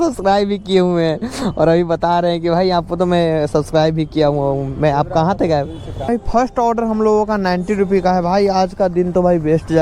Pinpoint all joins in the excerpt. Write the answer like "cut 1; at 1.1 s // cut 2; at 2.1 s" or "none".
cut 1; at 6.1 s